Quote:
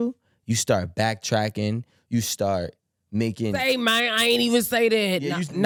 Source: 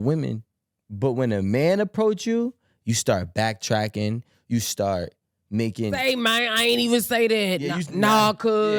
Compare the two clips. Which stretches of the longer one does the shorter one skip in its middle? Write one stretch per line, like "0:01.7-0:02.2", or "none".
none